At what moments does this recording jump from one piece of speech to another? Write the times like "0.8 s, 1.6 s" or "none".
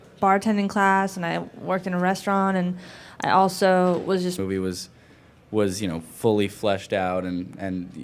none

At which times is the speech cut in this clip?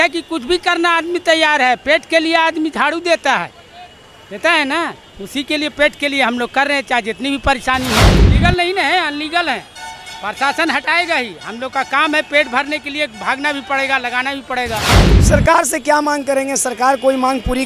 8.2 s, 15.0 s

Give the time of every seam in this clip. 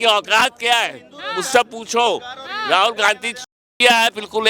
none

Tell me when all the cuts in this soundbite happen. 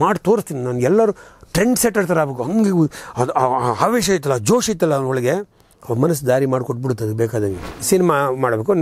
7.9 s

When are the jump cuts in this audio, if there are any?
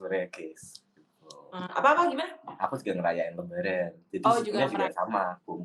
none

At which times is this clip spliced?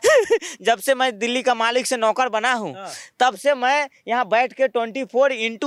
none

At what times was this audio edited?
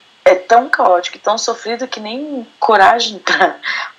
2.5 s

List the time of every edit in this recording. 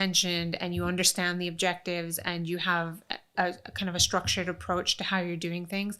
none

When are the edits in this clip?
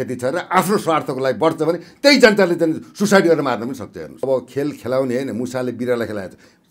4.2 s

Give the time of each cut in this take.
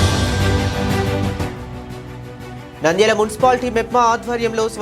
1.5 s

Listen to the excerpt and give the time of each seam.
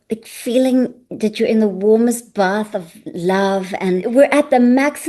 4.0 s

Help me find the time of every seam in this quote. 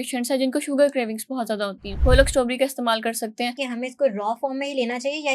1.8 s, 3.6 s

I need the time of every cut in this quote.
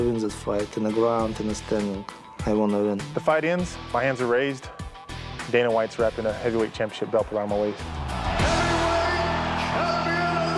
none

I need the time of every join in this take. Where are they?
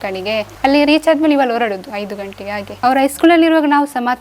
2.7 s

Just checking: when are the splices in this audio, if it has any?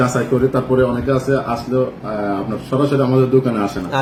none

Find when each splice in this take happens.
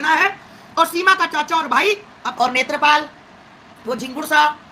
2.2 s

